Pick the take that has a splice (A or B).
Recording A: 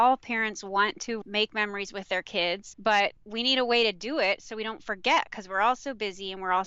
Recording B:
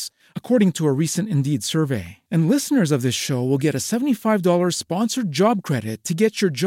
A